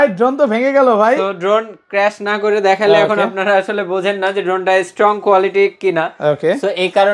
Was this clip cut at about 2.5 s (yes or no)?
no